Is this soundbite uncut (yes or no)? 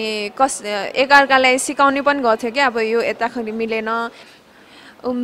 no